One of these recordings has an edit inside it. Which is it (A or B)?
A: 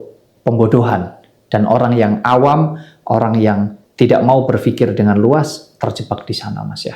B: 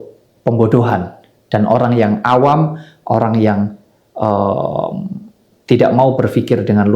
A